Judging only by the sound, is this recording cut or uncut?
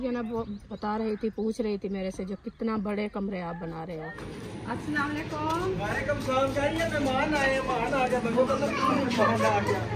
cut